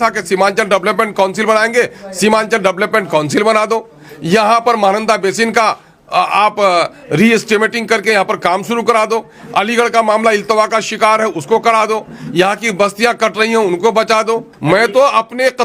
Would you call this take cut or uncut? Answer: cut